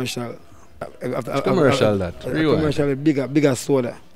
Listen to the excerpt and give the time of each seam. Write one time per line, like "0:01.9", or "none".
0:00.9